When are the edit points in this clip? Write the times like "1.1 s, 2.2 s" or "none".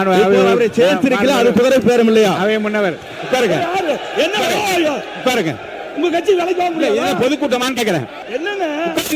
8.2 s

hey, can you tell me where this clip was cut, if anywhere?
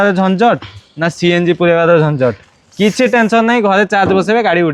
none

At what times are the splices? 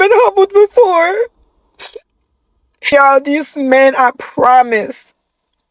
2.9 s

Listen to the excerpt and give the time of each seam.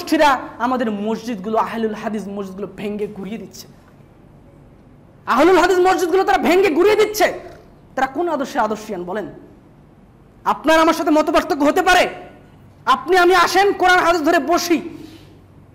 none

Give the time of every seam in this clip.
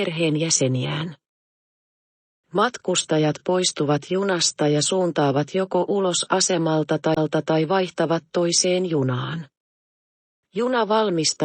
7.7 s

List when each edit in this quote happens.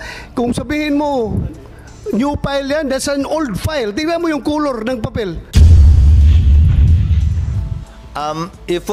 5.4 s, 7.6 s

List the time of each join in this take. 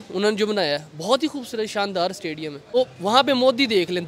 2.7 s

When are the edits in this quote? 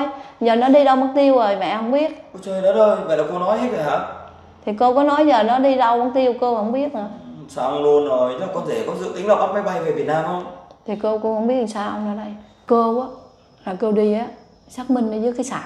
12.6 s

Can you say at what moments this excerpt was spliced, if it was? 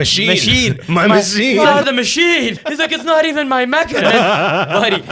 1.7 s, 2.6 s, 3.9 s

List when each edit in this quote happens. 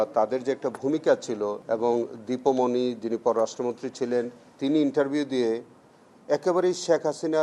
1.6 s

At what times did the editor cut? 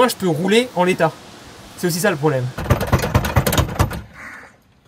2.5 s

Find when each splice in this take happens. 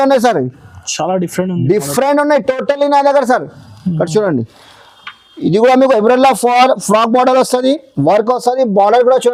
none

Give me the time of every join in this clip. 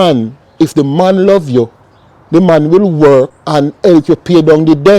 3.4 s

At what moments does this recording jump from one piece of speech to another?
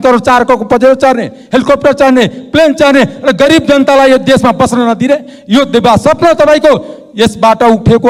none

